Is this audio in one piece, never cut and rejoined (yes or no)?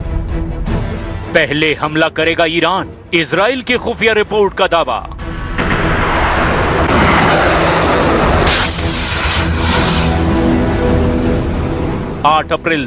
yes